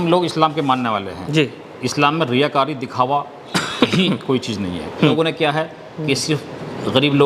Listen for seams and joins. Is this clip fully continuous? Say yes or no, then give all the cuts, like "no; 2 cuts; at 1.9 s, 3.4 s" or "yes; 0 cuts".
no; 1 cut; at 5.1 s